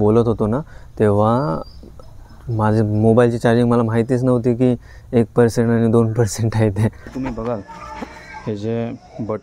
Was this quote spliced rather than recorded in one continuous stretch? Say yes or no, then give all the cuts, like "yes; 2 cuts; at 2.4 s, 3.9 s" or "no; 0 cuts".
yes; 1 cut; at 7.1 s